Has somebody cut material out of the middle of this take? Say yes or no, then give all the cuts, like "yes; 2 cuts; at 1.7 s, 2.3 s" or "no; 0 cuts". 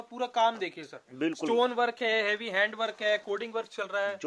no; 0 cuts